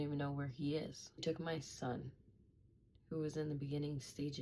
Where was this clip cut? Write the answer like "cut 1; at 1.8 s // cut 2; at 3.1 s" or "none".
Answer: cut 1; at 1.2 s